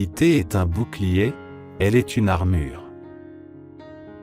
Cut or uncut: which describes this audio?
cut